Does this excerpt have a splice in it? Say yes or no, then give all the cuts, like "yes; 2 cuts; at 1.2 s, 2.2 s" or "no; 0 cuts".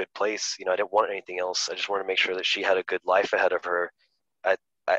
no; 0 cuts